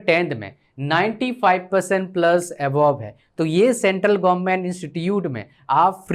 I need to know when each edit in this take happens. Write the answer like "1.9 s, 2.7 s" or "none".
none